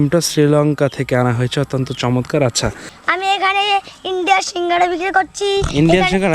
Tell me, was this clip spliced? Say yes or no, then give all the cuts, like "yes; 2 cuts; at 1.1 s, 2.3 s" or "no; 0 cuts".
yes; 1 cut; at 2.9 s